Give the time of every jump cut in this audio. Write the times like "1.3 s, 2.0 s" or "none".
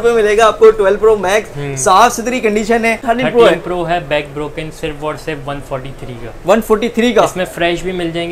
3.0 s